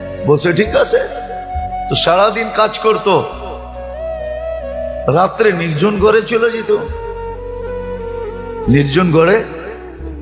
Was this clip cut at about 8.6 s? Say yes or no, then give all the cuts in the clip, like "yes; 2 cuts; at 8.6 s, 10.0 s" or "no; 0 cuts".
yes; 2 cuts; at 7.2 s, 8.6 s